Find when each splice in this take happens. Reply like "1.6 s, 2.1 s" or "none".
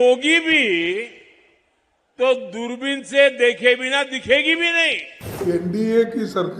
5.4 s